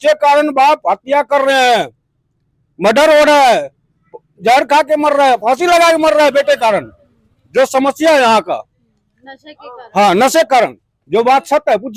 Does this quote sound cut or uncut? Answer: uncut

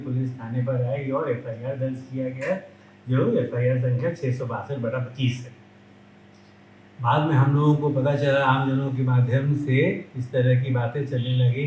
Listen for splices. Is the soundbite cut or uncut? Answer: uncut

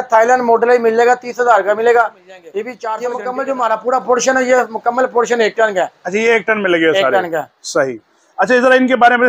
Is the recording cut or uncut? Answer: cut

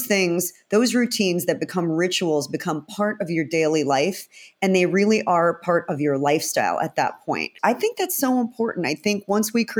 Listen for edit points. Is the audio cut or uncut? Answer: cut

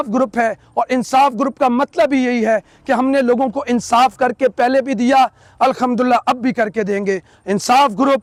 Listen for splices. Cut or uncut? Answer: uncut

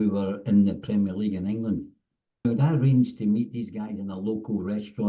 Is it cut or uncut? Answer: cut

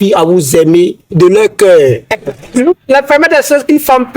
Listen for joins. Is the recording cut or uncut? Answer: cut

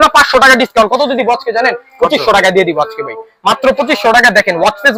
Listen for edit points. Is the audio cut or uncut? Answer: uncut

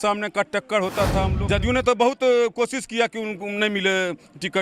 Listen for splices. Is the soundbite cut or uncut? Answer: cut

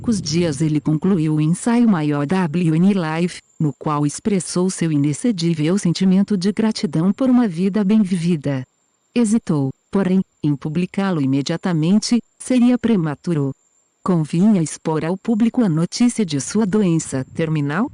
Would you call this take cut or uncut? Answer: uncut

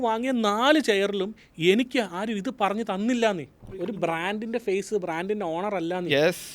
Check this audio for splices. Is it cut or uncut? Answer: cut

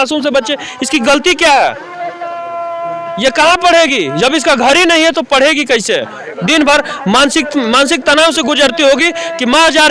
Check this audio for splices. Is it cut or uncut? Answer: uncut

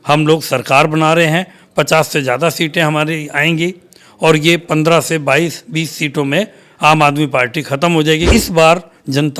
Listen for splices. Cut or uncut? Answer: cut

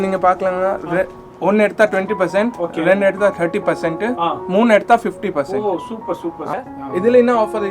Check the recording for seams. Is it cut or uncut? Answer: cut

